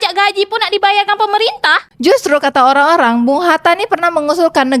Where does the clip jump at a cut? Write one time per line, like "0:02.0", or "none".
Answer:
0:01.9